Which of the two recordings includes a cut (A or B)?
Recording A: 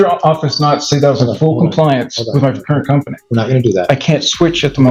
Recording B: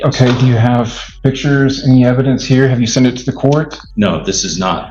B